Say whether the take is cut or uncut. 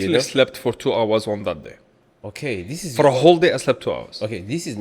uncut